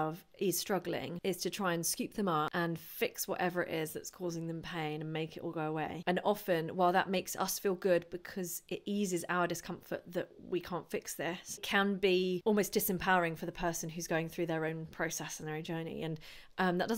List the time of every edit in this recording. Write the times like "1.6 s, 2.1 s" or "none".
1.1 s, 2.5 s, 6.0 s, 11.6 s, 12.4 s

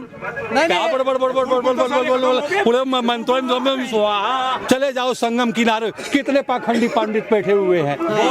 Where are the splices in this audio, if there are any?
4.6 s

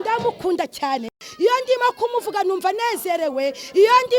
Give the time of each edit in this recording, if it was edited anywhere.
1.2 s

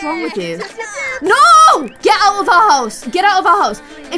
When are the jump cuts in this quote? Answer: 2.0 s

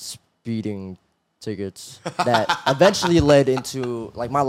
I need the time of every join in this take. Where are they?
none

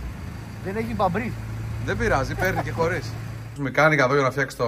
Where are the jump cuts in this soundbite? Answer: 3.6 s

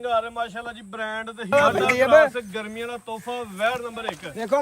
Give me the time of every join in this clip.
1.5 s

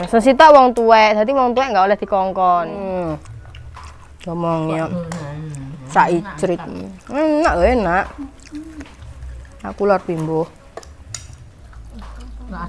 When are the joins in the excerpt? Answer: 2.9 s

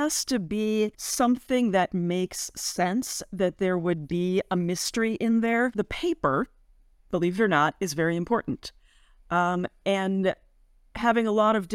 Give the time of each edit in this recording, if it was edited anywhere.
1.0 s, 5.7 s

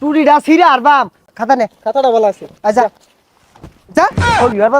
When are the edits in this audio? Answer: 1.2 s

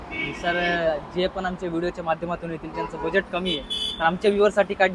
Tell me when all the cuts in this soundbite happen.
none

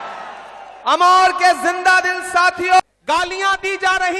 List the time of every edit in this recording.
2.8 s

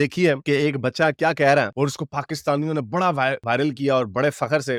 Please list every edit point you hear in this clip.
none

